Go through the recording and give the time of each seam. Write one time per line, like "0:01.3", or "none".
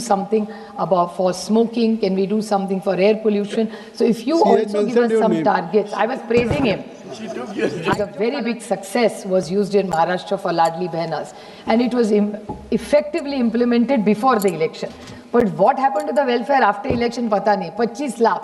0:08.1